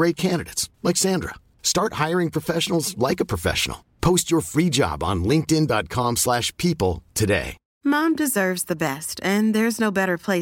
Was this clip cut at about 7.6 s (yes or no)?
yes